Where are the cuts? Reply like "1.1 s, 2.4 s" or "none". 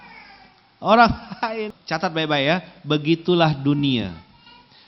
1.7 s